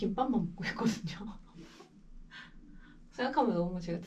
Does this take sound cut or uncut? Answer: uncut